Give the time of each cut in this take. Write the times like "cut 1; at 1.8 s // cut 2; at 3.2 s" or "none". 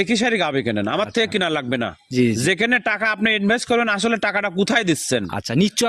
none